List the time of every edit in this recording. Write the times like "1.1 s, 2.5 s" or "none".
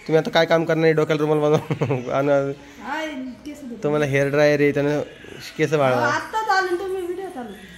none